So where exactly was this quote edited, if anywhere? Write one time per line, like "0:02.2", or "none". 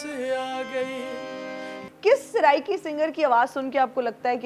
0:01.8